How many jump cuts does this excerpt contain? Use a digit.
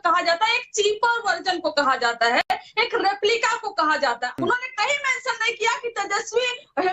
1